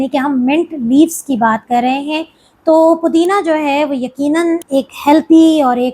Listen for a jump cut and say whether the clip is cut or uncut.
cut